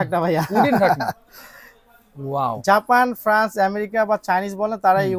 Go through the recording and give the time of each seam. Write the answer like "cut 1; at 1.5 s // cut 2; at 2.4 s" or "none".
none